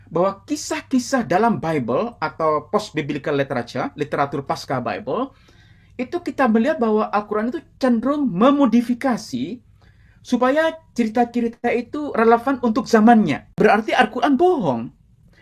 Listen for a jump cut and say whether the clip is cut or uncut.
cut